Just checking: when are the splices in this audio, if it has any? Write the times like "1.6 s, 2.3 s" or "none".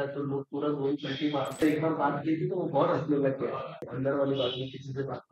1.6 s, 3.9 s